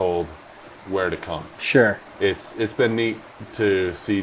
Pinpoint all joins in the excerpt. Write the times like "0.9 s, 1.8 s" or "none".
2.1 s